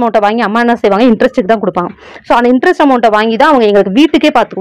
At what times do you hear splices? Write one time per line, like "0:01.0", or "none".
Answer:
none